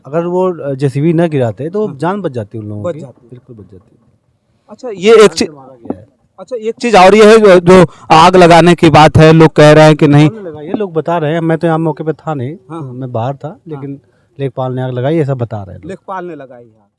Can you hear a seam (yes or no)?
no